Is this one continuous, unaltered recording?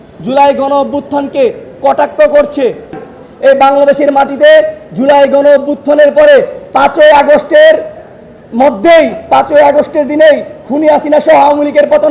no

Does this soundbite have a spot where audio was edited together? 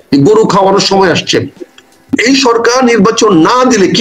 yes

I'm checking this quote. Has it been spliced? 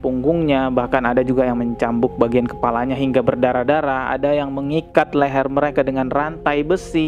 no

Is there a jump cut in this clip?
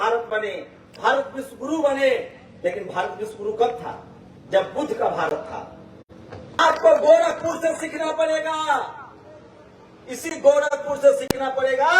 yes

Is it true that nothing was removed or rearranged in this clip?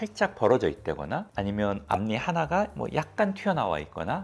yes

